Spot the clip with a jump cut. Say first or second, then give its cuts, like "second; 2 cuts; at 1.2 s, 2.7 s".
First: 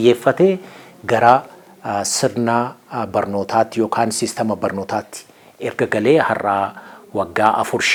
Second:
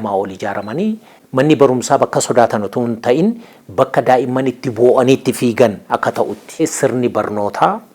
second; 2 cuts; at 1.1 s, 6.6 s